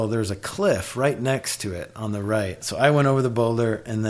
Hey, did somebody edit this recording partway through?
yes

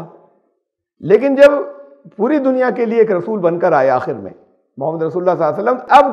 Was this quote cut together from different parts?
no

